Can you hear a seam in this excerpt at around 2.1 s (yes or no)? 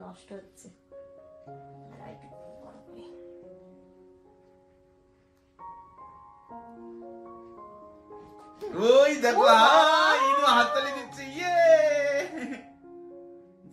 no